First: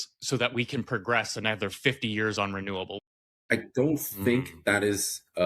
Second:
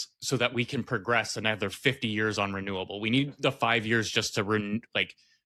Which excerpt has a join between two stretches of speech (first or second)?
first